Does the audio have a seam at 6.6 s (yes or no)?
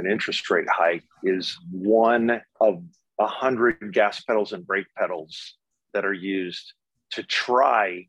no